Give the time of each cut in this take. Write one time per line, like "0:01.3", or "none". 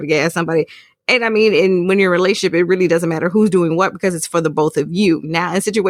none

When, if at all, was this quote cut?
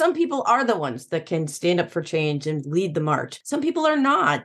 0:03.3

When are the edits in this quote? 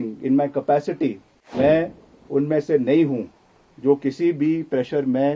0:01.5

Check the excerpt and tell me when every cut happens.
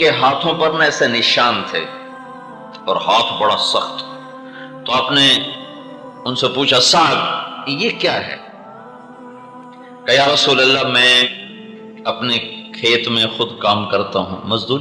0:08.3
0:09.8

